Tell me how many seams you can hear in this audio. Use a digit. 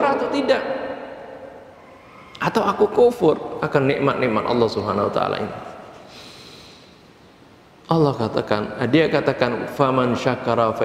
0